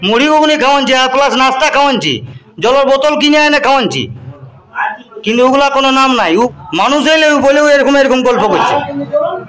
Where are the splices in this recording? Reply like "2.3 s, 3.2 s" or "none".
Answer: 6.5 s